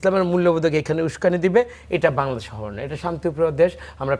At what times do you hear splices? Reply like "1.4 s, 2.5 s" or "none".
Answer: none